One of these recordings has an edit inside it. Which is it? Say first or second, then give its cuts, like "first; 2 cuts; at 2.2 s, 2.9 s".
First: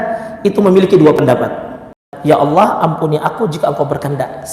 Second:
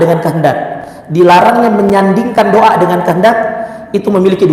first; 1 cut; at 2.1 s